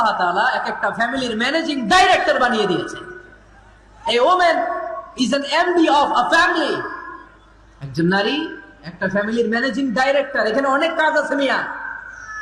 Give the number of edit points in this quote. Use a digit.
0